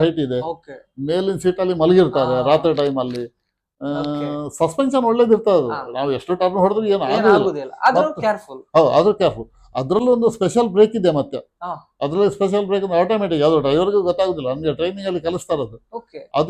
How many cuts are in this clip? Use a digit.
0